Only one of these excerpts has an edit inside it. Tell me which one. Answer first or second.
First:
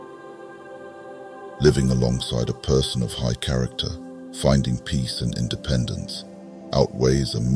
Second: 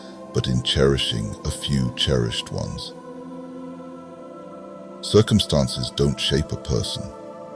second